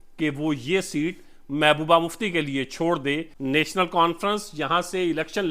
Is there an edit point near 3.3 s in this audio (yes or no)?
yes